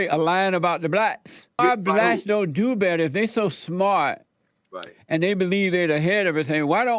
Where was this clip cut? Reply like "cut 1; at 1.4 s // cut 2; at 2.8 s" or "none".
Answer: cut 1; at 1.6 s